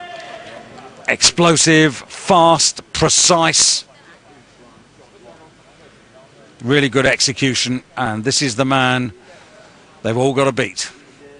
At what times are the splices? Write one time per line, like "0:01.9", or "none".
0:02.8